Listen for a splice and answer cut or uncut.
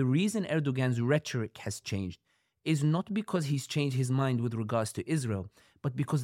uncut